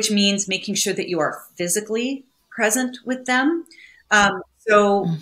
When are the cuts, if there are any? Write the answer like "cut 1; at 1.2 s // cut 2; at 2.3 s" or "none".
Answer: none